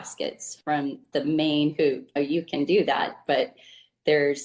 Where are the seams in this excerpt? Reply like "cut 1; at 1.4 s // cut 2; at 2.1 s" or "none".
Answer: cut 1; at 1.1 s